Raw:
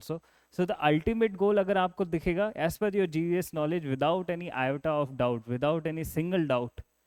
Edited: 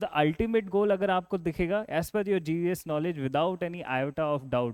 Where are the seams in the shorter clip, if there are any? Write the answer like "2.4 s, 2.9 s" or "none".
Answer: none